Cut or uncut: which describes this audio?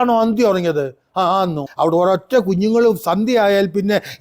cut